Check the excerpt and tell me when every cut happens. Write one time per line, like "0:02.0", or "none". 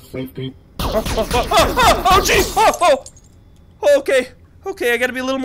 none